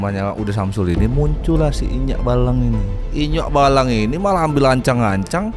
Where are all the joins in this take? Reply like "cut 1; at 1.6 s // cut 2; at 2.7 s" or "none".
cut 1; at 3.1 s